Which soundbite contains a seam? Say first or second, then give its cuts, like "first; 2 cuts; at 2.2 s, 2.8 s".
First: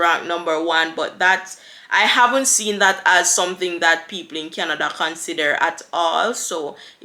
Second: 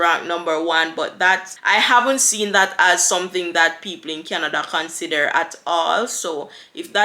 second; 1 cut; at 1.5 s